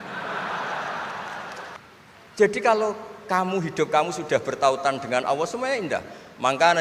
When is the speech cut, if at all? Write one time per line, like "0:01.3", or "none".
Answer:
0:01.8